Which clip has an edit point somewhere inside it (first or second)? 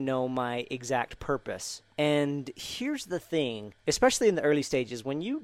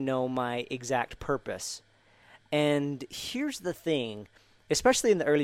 first